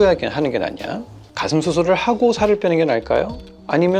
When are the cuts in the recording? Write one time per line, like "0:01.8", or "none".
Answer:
0:01.2